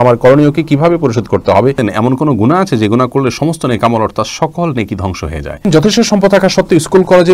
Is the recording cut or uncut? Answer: cut